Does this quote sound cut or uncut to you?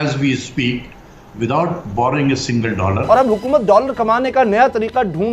cut